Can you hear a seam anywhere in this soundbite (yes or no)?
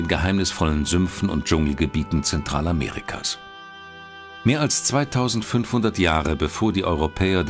no